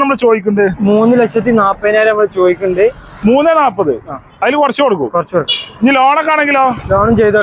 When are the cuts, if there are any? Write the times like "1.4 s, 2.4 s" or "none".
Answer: none